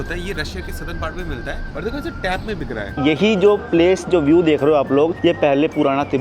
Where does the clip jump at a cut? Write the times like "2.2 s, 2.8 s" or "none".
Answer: 1.7 s, 2.9 s, 5.2 s